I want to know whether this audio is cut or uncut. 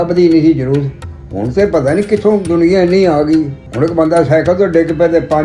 cut